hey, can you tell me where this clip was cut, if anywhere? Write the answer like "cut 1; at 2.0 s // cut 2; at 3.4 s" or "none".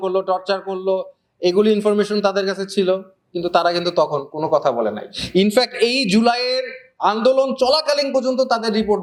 none